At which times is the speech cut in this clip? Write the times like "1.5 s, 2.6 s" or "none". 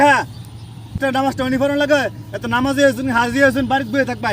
1.0 s